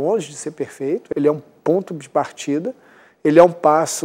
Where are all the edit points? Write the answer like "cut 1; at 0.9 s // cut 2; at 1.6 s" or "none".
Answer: cut 1; at 1.0 s